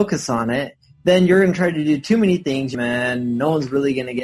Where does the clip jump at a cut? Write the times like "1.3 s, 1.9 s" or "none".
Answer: 2.7 s